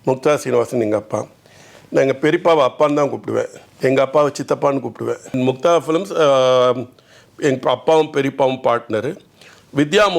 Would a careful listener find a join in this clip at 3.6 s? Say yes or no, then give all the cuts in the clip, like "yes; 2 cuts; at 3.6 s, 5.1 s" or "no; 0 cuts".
yes; 2 cuts; at 3.6 s, 5.3 s